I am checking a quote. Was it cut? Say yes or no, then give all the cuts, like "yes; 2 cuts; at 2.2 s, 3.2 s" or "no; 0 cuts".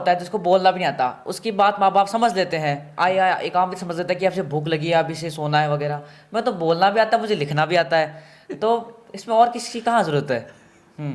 no; 0 cuts